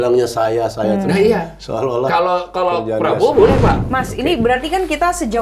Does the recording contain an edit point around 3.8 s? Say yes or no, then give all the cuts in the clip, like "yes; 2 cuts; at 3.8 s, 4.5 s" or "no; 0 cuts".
yes; 1 cut; at 3.8 s